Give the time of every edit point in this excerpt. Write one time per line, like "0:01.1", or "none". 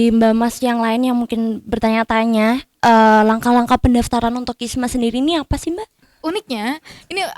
0:06.1

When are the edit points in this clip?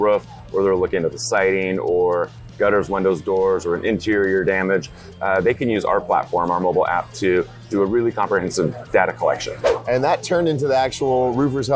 0:09.6

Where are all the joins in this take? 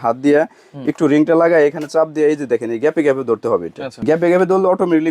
0:03.9

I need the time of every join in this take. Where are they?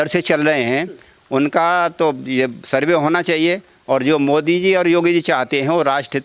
none

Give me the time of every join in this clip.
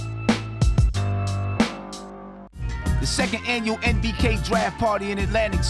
0:02.1

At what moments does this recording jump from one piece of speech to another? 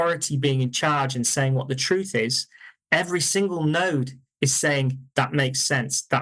none

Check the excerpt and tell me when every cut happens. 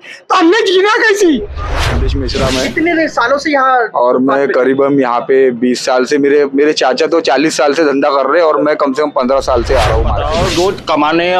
0:02.0
0:10.2

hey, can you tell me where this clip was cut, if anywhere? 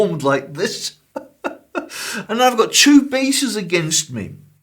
0:02.2

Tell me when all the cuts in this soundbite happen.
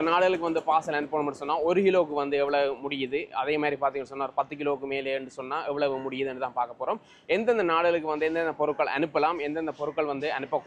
none

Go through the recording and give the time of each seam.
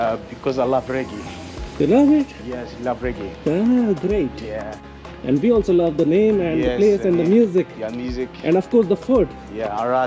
none

